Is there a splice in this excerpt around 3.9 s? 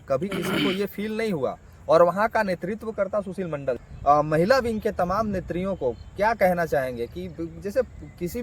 yes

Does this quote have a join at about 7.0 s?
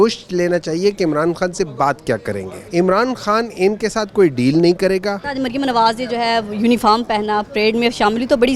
no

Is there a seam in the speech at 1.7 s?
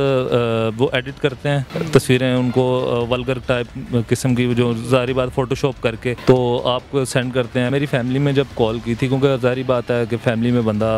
yes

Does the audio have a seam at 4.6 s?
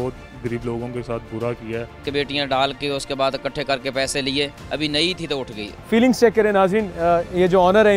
no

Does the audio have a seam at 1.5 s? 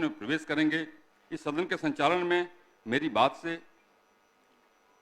yes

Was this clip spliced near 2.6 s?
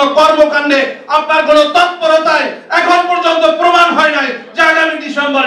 no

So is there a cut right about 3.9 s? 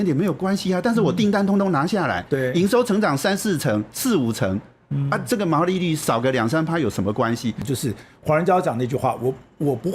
no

